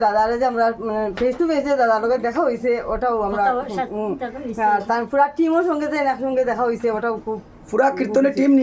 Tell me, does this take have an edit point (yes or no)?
no